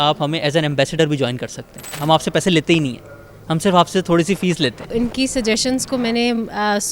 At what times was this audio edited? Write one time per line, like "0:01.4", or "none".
0:01.9
0:04.9